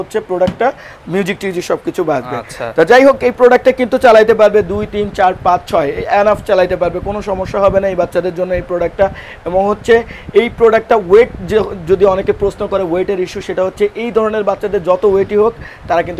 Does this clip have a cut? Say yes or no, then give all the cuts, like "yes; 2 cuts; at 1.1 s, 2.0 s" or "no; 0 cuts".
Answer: no; 0 cuts